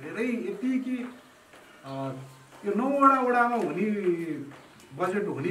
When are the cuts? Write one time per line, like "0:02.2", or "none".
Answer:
none